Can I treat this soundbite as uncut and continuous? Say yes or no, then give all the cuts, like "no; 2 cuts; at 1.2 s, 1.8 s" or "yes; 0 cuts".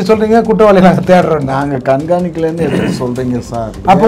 yes; 0 cuts